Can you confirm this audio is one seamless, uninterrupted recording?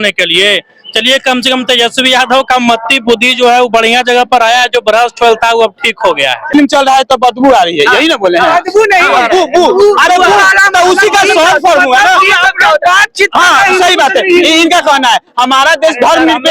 no; 1 cut; at 6.5 s

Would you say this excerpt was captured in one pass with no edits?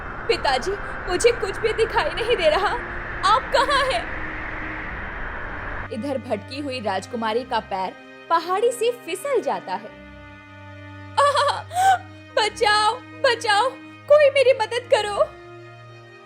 no; 1 cut; at 5.9 s

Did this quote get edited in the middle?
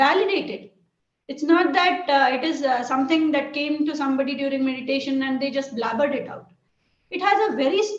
no; 0 cuts

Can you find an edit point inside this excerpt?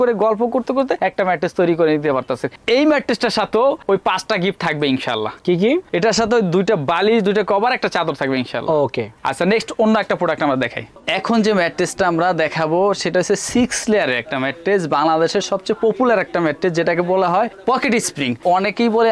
no; 0 cuts

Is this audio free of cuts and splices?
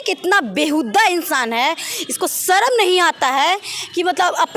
yes; 0 cuts

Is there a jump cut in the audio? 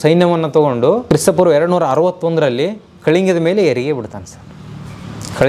yes; 1 cut; at 1.0 s

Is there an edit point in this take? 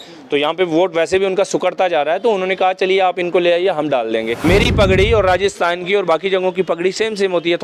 yes; 1 cut; at 4.3 s

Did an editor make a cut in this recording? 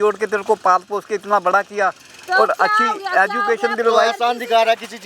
no; 0 cuts

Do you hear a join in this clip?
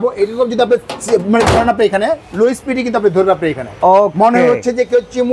no; 0 cuts

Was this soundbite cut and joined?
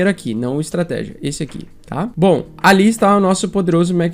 yes; 1 cut; at 2.1 s

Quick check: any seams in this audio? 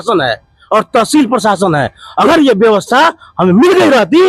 no; 0 cuts

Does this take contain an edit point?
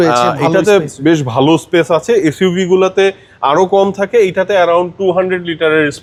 no; 0 cuts

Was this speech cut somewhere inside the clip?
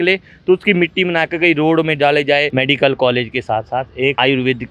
yes; 1 cut; at 2.5 s

